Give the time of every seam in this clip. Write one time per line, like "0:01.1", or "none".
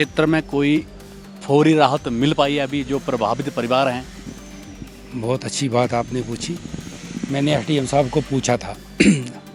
none